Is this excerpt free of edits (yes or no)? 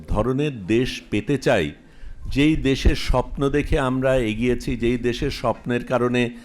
yes